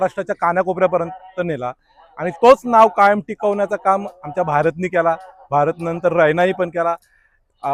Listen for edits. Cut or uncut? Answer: uncut